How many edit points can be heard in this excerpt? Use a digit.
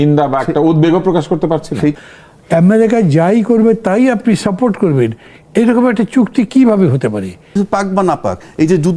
2